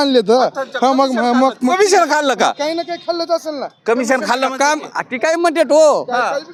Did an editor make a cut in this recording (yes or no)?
no